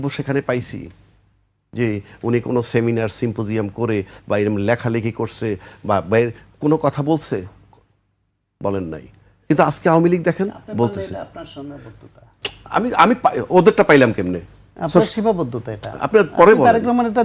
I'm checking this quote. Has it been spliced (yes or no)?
no